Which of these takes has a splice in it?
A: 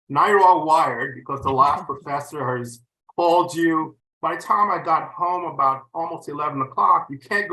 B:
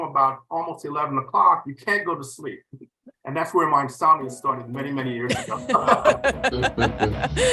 A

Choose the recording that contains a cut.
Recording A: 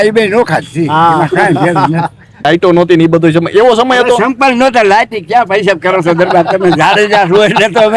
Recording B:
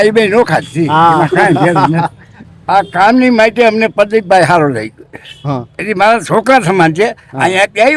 A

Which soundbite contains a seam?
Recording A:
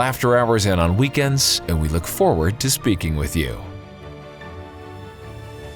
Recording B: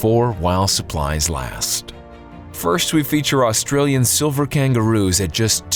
A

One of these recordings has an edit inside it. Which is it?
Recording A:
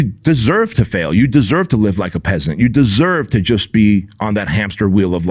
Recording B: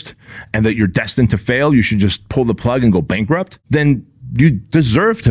B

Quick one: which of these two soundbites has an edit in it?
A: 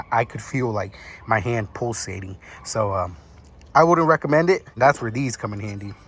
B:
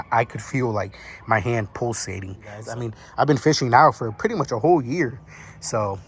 B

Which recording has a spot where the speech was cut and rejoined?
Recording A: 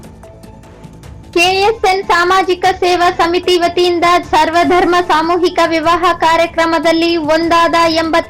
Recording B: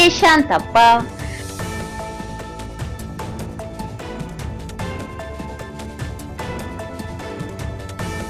A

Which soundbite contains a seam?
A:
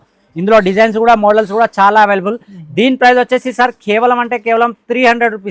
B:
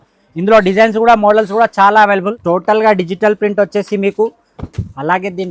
B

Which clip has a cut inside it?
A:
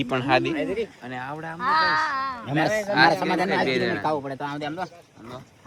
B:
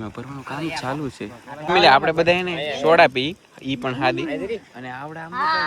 B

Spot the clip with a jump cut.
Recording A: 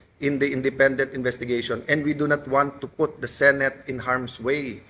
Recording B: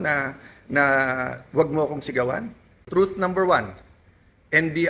B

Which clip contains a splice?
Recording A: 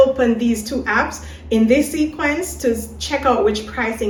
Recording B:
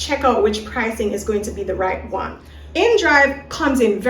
B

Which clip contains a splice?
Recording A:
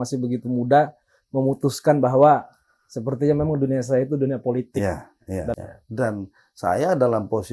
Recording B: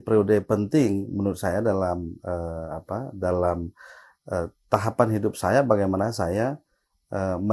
A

